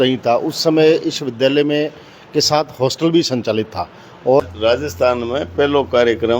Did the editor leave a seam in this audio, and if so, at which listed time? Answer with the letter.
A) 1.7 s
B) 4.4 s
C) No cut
B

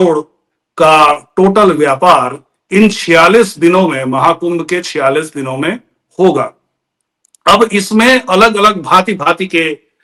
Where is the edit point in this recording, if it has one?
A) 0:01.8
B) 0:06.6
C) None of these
C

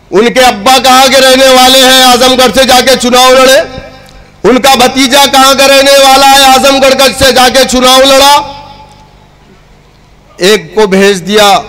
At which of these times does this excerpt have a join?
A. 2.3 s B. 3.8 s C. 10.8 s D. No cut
D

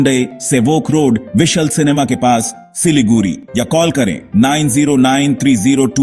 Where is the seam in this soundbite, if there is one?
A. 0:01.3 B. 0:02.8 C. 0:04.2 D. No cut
D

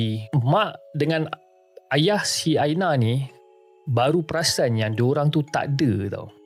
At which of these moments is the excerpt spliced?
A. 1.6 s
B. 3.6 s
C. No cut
C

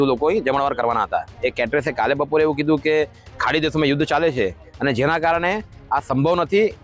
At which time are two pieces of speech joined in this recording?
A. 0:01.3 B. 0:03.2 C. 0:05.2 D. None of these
A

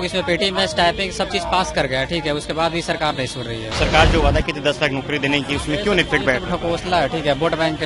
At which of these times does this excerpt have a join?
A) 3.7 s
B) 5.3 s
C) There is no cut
A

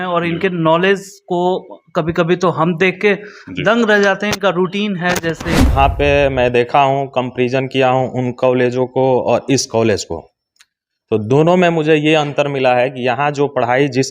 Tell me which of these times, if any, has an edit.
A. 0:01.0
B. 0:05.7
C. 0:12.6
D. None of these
B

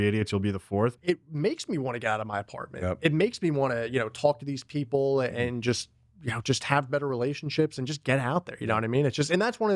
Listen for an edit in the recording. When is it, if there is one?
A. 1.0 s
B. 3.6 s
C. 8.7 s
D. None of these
A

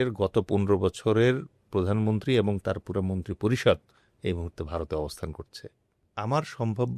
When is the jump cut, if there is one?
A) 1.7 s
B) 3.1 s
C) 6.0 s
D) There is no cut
C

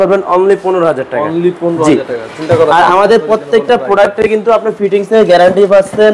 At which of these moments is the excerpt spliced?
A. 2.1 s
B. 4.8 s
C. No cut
C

